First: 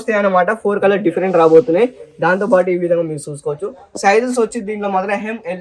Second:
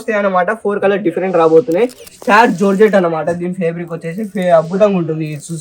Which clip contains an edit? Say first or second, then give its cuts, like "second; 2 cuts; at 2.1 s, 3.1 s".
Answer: second; 1 cut; at 2.1 s